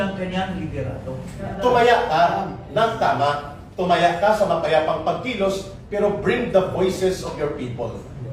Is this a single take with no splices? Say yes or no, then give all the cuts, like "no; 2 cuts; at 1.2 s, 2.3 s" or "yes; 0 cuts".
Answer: no; 1 cut; at 1.5 s